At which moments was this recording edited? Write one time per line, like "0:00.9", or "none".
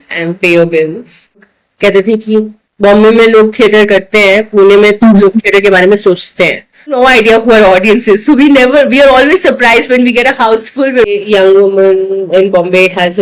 0:01.4
0:07.0
0:11.1